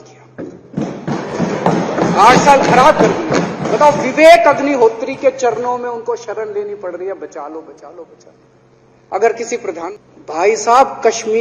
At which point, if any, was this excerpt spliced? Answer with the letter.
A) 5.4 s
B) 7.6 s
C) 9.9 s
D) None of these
C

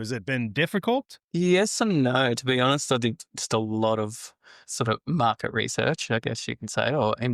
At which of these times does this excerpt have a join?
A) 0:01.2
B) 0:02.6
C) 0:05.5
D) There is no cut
A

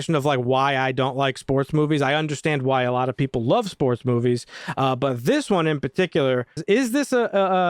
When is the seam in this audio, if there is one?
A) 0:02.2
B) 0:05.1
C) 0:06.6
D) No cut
C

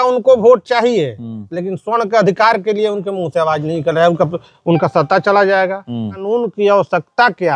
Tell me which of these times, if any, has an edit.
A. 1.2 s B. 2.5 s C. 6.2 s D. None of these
C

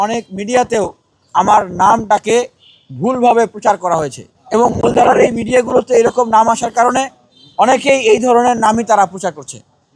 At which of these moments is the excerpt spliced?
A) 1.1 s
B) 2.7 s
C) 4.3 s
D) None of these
C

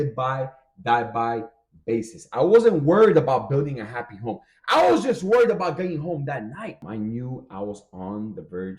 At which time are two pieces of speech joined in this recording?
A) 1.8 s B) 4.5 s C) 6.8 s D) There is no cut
C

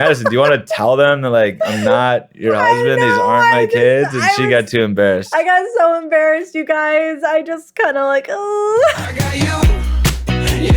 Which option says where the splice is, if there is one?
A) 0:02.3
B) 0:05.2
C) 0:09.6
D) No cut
C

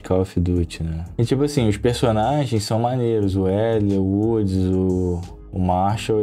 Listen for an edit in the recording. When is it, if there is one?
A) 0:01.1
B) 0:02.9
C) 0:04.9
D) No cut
D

